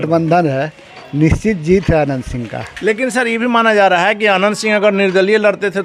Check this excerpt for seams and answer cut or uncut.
uncut